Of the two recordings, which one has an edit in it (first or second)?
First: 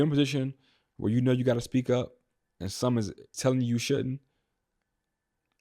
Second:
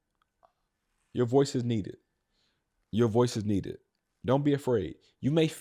first